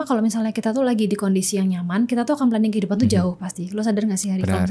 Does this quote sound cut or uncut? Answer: uncut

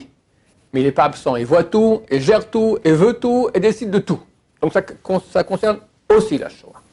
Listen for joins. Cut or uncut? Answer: uncut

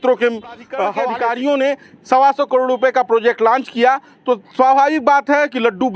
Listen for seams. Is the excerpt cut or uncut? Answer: cut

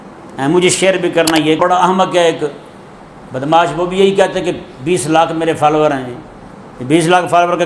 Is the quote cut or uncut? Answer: cut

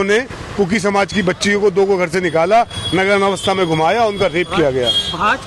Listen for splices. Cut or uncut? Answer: uncut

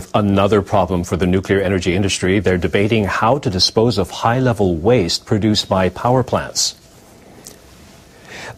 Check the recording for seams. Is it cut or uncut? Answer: uncut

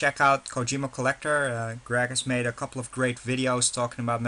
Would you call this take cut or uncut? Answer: cut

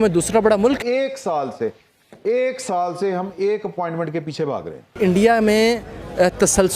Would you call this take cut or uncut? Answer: cut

